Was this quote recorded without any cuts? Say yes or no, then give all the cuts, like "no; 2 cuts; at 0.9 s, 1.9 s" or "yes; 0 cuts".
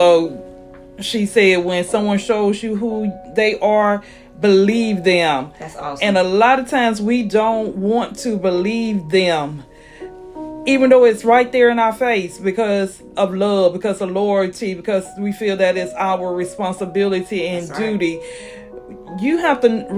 yes; 0 cuts